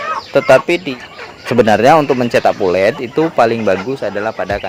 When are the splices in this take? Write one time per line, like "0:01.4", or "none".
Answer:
0:00.9